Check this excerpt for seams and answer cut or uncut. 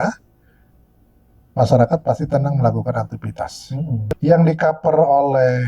cut